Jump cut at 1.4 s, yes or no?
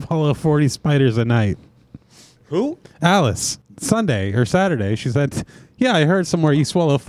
no